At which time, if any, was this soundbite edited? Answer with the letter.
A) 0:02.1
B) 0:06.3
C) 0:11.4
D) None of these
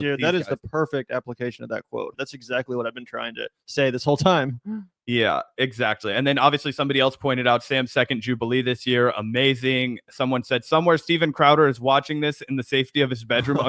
A